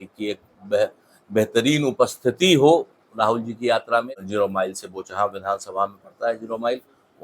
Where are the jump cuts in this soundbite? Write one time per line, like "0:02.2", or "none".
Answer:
0:04.2